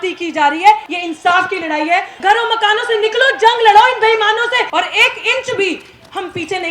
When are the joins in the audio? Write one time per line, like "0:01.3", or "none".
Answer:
0:00.9
0:02.1
0:04.7